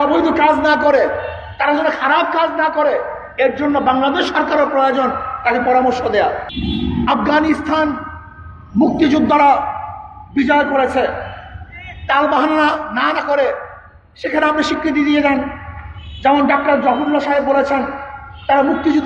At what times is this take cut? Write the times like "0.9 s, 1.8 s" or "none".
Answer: 6.5 s